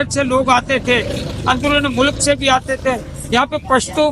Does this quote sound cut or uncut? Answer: uncut